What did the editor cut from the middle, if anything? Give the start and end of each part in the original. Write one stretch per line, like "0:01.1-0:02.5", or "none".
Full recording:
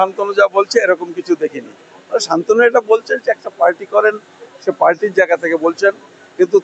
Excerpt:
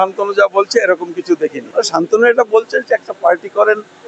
0:01.6-0:02.0